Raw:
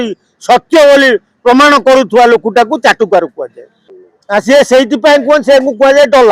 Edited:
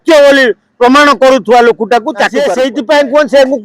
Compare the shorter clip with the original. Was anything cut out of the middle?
yes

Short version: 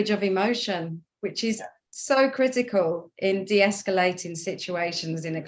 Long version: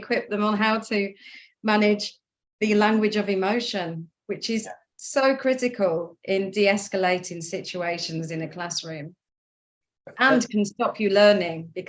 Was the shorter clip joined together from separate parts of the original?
no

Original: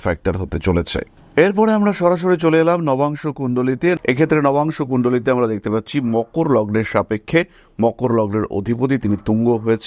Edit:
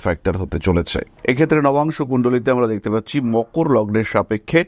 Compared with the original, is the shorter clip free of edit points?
no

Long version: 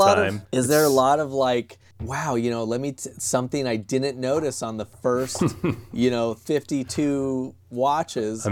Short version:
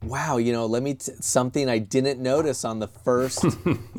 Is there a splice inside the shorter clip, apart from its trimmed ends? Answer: no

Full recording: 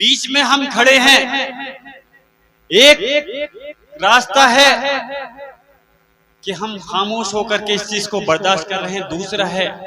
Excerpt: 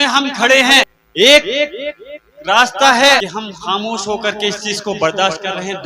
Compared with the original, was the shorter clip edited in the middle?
yes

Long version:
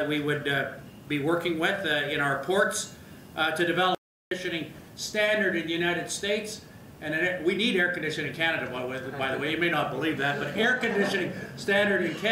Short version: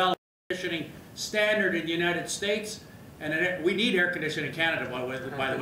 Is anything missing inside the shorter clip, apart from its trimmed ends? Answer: no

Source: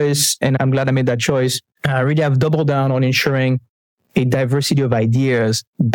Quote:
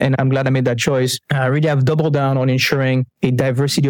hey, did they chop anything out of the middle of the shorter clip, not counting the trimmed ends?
yes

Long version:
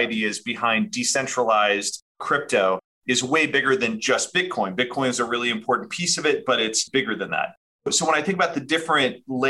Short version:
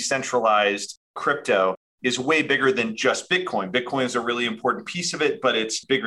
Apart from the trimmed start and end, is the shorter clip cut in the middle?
no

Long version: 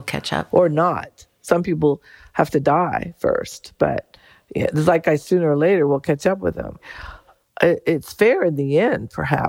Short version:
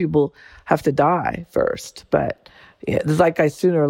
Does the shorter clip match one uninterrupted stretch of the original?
yes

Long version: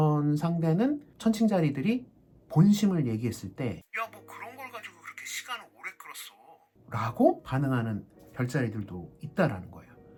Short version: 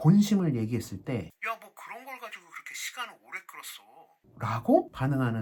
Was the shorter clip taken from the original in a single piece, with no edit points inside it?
yes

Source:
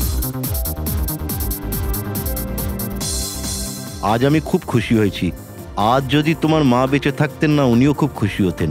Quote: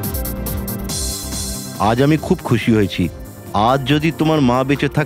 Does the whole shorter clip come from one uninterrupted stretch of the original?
no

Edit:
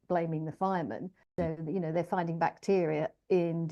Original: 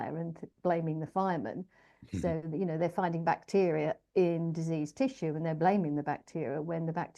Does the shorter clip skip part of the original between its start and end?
yes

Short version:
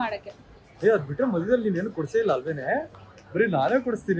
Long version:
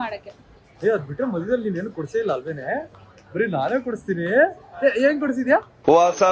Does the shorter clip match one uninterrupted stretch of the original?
yes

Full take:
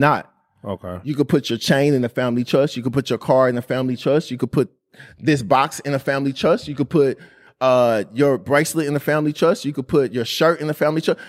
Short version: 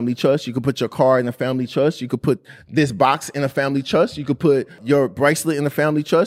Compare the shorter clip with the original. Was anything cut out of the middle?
yes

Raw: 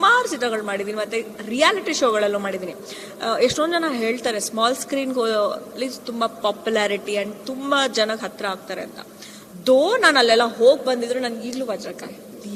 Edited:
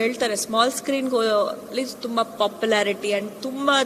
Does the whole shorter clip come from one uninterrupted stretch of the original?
yes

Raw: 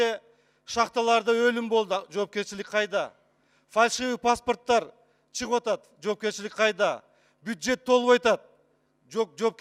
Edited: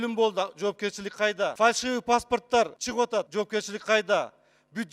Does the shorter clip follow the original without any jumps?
no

